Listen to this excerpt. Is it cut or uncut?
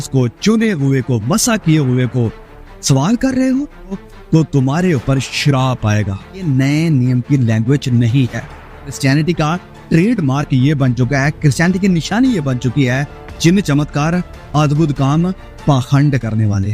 cut